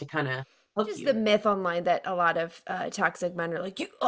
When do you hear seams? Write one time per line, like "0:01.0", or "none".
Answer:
0:01.0